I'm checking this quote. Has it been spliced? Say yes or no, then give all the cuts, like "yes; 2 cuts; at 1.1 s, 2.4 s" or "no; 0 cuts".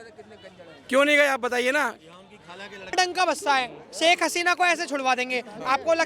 yes; 1 cut; at 2.9 s